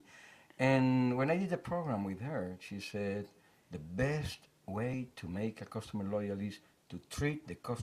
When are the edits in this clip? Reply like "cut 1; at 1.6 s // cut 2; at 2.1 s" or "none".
cut 1; at 3.1 s

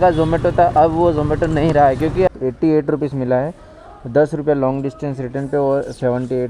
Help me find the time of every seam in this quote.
cut 1; at 2.3 s

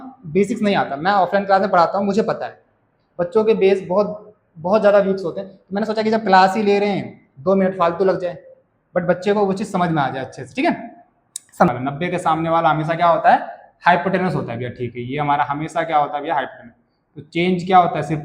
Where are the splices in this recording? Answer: cut 1; at 11.7 s

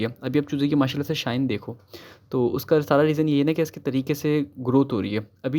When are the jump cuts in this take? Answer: none

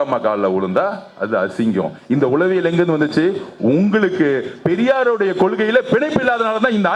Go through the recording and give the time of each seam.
none

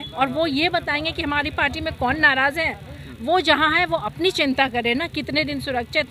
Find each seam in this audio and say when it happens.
none

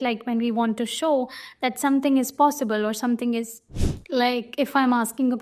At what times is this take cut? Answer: cut 1; at 3.9 s

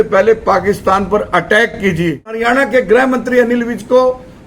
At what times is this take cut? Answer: cut 1; at 2.4 s

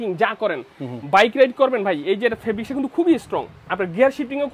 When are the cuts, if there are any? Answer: none

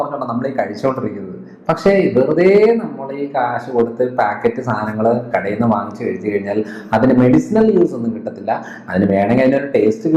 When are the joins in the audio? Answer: none

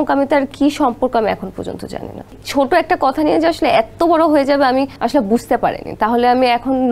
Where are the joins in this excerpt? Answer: cut 1; at 2.4 s // cut 2; at 4.9 s

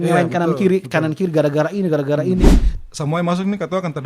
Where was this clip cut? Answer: cut 1; at 2.6 s

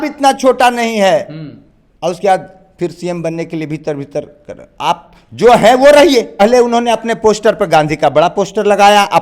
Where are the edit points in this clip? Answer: cut 1; at 6.4 s

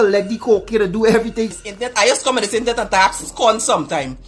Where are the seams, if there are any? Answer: cut 1; at 1.5 s

